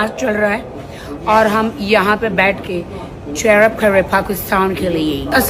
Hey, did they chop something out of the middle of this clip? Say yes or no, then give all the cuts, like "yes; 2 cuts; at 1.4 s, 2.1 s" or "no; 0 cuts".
no; 0 cuts